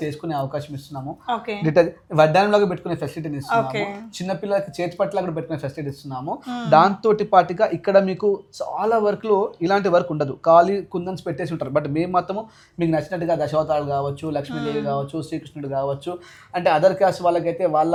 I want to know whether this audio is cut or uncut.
uncut